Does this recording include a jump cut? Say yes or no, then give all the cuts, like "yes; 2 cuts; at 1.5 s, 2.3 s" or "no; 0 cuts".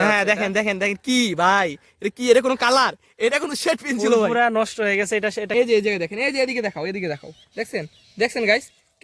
yes; 1 cut; at 5.5 s